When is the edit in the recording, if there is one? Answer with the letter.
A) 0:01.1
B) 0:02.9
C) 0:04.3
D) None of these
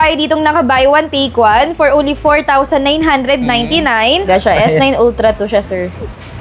C